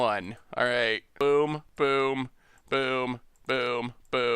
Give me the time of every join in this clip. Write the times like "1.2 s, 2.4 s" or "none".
1.1 s, 1.7 s